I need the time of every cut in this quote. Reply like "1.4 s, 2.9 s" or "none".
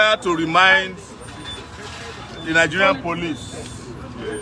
none